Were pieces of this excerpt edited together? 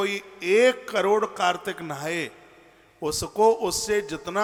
no; 0 cuts

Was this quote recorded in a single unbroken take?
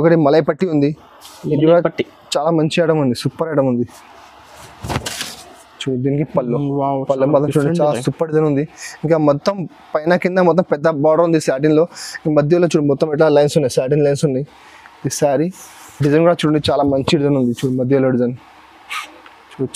yes; 0 cuts

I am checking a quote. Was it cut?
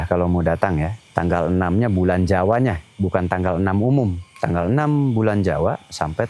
yes; 2 cuts; at 1.0 s, 4.3 s

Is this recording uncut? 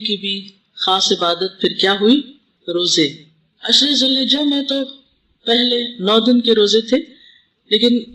yes; 0 cuts

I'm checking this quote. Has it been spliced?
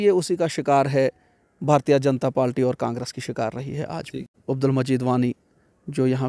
yes; 1 cut; at 4.4 s

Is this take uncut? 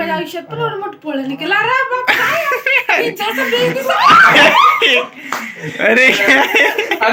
yes; 0 cuts

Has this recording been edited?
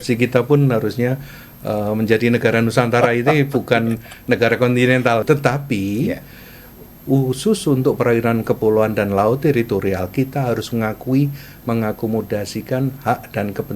yes; 1 cut; at 5.2 s

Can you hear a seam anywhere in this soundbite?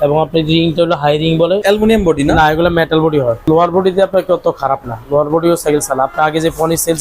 yes; 2 cuts; at 1.6 s, 3.4 s

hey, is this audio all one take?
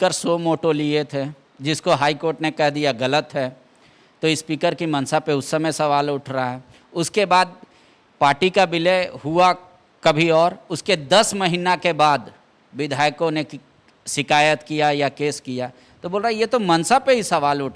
yes; 0 cuts

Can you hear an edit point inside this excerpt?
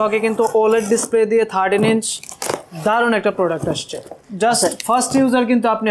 yes; 1 cut; at 4.2 s

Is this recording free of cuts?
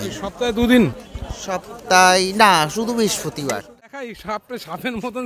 no; 1 cut; at 3.9 s

